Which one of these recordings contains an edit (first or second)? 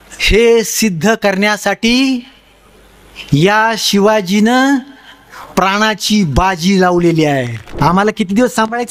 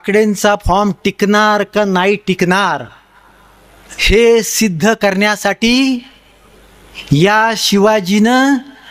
first